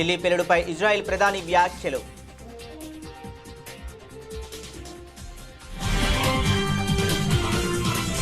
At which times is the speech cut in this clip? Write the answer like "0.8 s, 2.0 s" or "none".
2.1 s